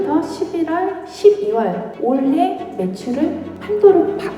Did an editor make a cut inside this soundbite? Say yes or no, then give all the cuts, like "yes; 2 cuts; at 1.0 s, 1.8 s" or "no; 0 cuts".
yes; 2 cuts; at 1.9 s, 3.5 s